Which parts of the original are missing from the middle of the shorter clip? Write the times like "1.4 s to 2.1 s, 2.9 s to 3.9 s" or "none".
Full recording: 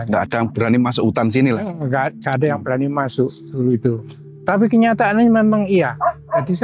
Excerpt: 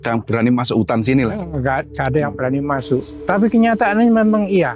3.4 s to 4.3 s